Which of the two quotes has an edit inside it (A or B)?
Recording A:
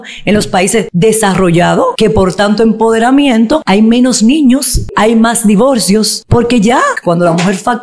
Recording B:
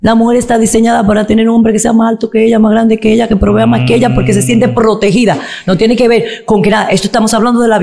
A